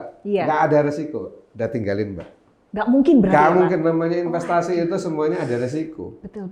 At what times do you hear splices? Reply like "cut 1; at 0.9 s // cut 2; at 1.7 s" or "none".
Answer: none